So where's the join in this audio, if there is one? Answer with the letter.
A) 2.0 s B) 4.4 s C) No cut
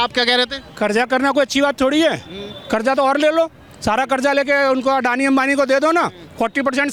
C